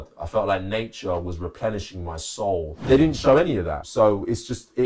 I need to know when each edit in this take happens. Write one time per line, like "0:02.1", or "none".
0:02.8
0:03.8